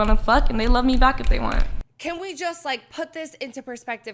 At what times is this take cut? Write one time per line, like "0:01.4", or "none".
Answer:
0:01.7